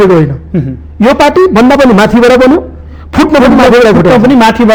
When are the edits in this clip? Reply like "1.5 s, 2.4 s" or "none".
none